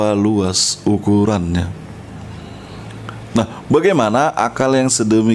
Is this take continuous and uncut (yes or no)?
yes